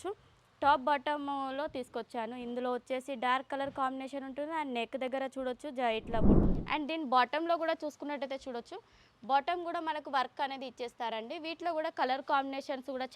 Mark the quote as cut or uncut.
cut